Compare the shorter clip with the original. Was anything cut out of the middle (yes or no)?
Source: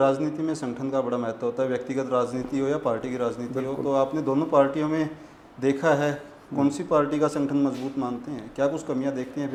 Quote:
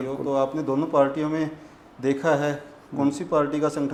no